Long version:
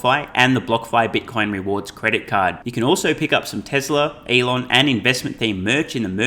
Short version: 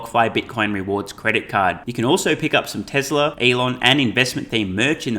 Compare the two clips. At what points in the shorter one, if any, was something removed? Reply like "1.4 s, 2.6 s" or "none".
3.4 s